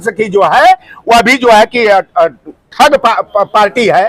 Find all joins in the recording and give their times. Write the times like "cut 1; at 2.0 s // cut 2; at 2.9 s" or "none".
none